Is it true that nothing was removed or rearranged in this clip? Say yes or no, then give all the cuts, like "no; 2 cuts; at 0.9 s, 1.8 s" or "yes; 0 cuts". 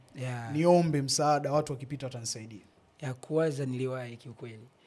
yes; 0 cuts